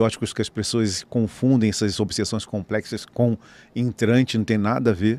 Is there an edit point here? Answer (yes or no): no